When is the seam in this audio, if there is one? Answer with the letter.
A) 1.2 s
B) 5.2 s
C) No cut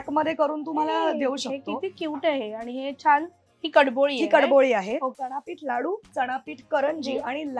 B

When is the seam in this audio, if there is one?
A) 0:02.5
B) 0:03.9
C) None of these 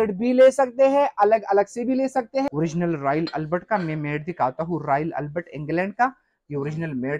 A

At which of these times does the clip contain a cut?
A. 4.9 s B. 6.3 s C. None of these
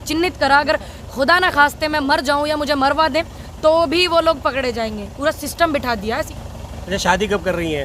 B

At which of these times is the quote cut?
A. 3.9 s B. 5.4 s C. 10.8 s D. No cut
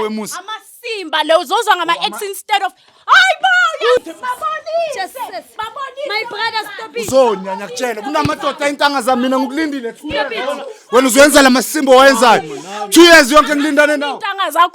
A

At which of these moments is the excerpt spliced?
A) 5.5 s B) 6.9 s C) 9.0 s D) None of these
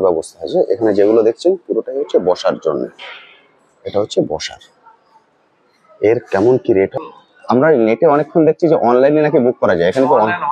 B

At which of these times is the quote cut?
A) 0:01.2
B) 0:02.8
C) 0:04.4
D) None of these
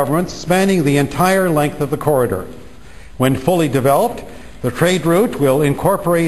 B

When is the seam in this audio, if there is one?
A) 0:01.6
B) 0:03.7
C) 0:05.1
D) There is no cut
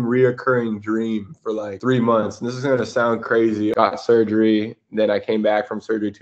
B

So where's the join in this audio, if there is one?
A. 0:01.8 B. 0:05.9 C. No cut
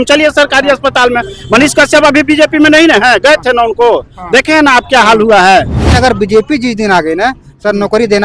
B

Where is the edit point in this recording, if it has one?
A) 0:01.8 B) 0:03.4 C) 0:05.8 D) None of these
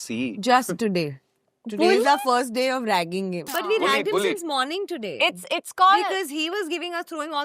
B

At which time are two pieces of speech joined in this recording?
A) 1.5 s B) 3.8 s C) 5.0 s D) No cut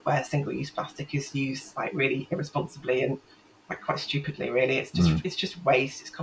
D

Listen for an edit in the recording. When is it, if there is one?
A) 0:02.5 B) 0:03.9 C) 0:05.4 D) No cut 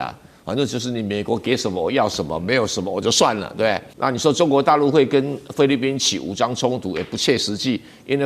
B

